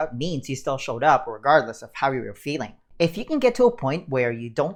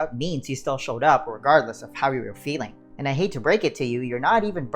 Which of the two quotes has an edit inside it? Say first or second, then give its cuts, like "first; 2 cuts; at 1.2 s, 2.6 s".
second; 1 cut; at 2.8 s